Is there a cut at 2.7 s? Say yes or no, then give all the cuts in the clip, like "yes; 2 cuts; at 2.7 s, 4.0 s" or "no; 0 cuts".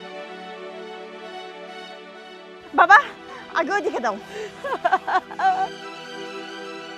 yes; 2 cuts; at 2.7 s, 5.7 s